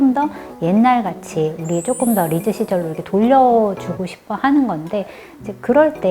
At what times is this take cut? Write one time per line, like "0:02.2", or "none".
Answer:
none